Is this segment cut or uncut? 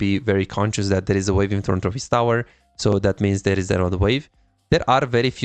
uncut